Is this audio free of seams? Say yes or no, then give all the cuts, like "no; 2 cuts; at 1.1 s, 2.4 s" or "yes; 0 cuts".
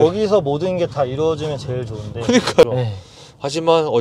no; 1 cut; at 2.6 s